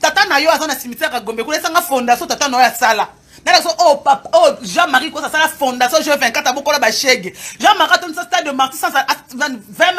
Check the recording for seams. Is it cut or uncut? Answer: uncut